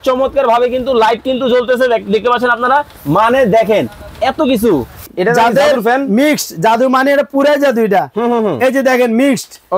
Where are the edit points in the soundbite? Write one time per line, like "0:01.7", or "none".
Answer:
0:05.0